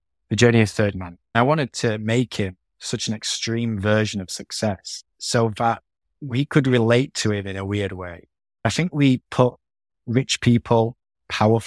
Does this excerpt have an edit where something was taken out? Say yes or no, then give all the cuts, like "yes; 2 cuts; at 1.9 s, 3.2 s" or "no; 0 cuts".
yes; 2 cuts; at 1.1 s, 8.7 s